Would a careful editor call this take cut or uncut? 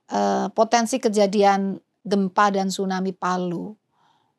cut